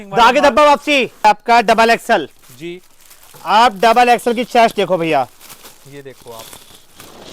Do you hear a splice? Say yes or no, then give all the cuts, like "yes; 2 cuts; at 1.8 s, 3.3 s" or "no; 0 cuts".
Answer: yes; 1 cut; at 1.2 s